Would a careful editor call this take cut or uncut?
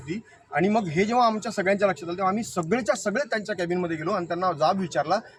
uncut